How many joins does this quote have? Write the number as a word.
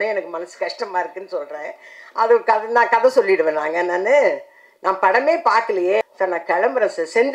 one